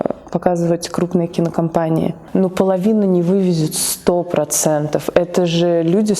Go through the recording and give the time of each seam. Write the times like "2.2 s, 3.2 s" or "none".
2.2 s